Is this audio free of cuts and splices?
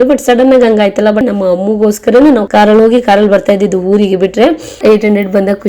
no; 3 cuts; at 1.2 s, 2.5 s, 4.7 s

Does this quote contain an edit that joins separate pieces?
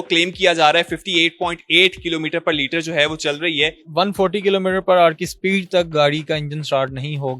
yes; 1 cut; at 3.8 s

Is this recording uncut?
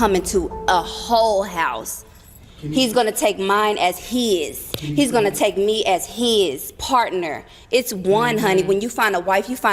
no; 1 cut; at 8.7 s

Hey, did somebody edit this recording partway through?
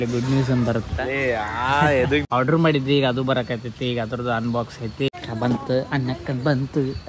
yes; 2 cuts; at 2.2 s, 5.1 s

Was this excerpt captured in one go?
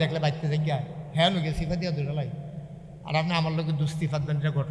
yes; 0 cuts

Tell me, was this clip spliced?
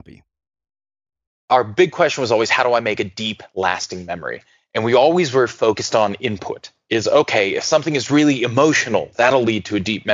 yes; 1 cut; at 1.4 s

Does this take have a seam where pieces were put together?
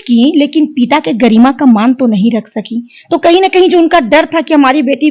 no; 0 cuts

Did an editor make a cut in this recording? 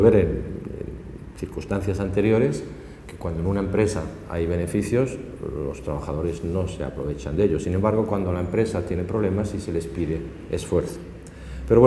no; 0 cuts

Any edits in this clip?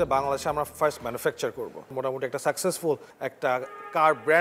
yes; 2 cuts; at 1.9 s, 3.1 s

